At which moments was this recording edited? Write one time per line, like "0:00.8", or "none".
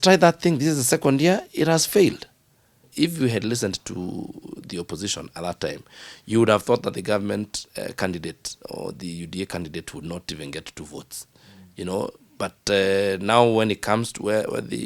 0:02.9